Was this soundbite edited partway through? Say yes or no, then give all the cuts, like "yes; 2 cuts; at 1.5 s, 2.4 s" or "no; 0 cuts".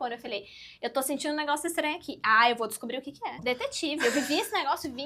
yes; 1 cut; at 3.5 s